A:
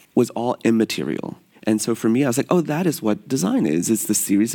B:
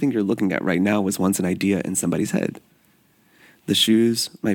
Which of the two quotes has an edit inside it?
A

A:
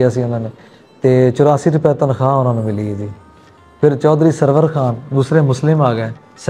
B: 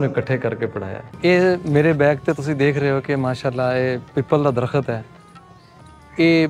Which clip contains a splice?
B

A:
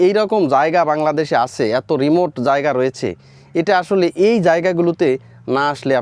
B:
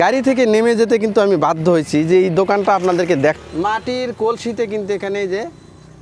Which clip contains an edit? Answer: B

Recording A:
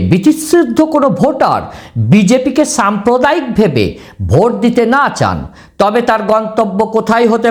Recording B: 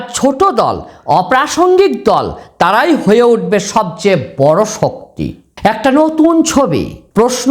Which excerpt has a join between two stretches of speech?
B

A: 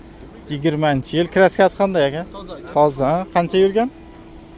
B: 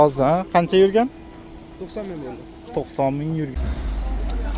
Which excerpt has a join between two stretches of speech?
B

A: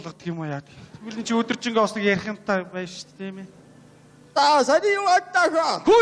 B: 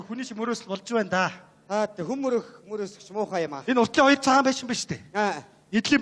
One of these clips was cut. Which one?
B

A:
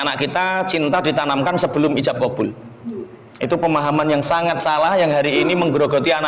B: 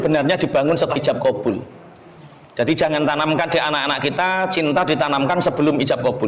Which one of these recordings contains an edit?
B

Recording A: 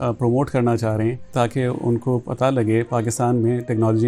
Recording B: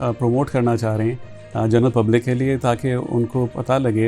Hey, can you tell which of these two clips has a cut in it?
A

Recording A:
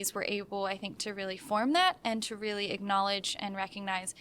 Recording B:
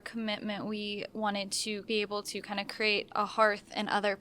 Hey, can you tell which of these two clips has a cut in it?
B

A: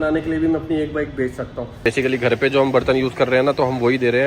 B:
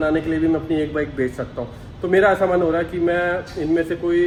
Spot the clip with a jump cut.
A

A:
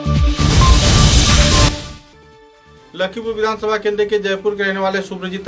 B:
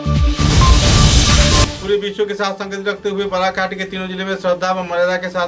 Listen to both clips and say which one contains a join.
A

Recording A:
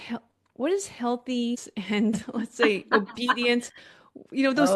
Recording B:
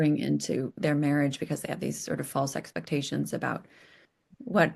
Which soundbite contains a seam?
A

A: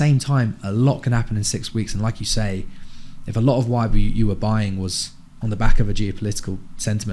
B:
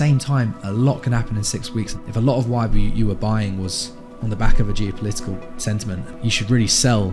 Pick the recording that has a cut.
B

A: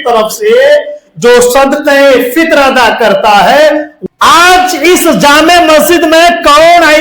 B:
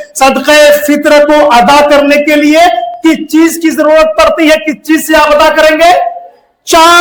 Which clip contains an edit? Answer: A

